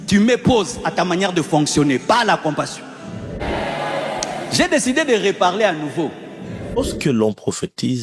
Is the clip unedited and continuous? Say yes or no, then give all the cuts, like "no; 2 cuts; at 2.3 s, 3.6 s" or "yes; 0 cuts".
no; 2 cuts; at 3.4 s, 6.8 s